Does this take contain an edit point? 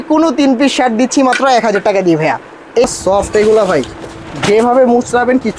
yes; 1 cut; at 2.8 s

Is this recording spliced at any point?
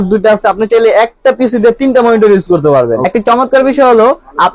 yes; 1 cut; at 3.1 s

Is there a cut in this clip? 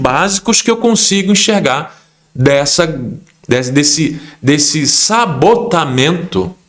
no; 0 cuts

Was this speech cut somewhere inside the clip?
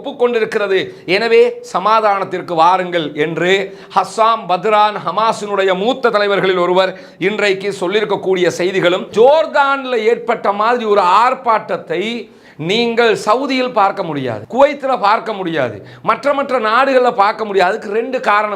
yes; 1 cut; at 9.1 s

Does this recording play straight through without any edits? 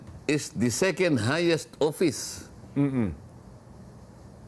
yes; 0 cuts

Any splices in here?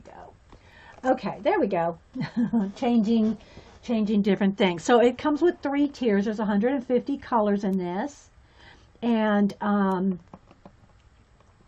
yes; 1 cut; at 8.1 s

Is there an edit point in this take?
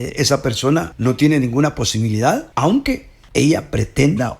yes; 3 cuts; at 0.9 s, 2.5 s, 3.1 s

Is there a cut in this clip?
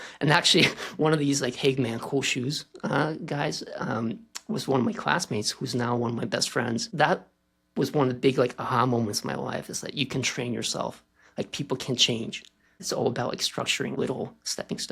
yes; 3 cuts; at 6.9 s, 12.8 s, 14.0 s

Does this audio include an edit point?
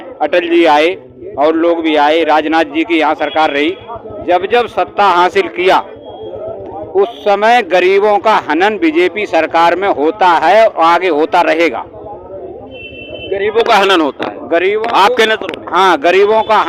no; 0 cuts

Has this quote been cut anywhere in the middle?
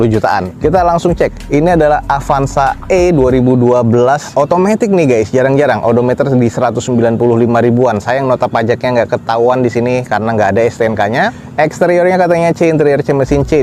no; 0 cuts

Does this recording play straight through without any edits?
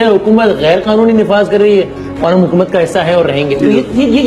yes; 0 cuts

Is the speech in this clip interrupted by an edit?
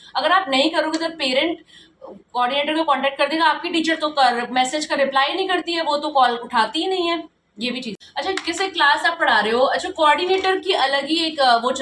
no; 0 cuts

